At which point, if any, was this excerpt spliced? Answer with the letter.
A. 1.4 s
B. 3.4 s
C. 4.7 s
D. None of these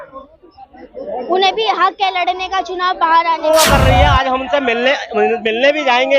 B